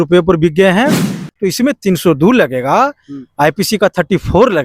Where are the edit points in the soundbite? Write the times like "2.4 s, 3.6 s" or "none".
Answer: 1.2 s